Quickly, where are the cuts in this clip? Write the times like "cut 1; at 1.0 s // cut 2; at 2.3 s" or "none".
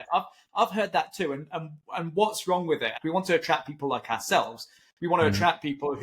cut 1; at 3.0 s